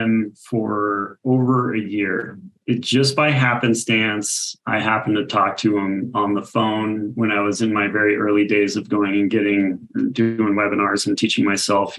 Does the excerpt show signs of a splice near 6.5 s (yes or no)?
no